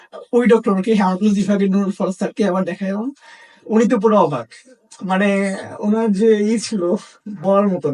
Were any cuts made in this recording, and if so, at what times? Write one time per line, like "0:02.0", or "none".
none